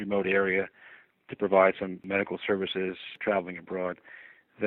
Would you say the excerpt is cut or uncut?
cut